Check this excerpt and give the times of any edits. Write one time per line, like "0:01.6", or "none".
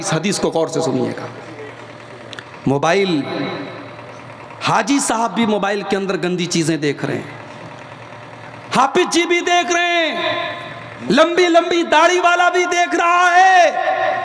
0:02.4